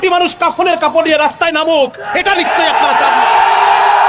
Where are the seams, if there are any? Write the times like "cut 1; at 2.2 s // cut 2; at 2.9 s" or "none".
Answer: none